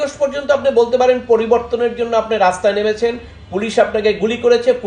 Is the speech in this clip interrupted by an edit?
no; 0 cuts

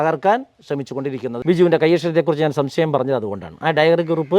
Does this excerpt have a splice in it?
yes; 1 cut; at 1.3 s

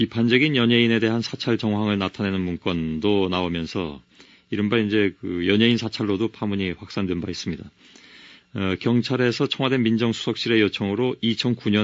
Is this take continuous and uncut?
no; 1 cut; at 1.6 s

